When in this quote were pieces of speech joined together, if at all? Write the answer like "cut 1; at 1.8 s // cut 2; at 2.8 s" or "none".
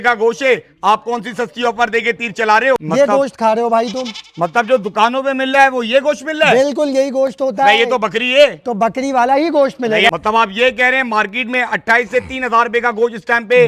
cut 1; at 2.8 s // cut 2; at 10.1 s